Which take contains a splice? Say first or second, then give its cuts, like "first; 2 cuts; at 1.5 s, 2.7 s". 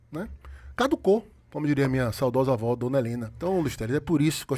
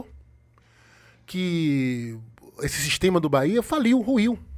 first; 1 cut; at 3.3 s